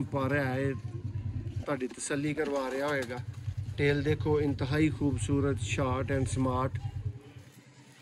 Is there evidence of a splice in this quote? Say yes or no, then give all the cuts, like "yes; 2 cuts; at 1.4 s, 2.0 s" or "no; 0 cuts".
no; 0 cuts